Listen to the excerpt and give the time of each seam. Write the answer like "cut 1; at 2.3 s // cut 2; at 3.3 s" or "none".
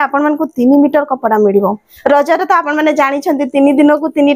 cut 1; at 1.9 s